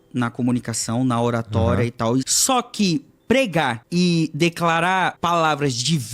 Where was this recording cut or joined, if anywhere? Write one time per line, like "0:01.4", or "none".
0:02.3
0:03.8
0:05.2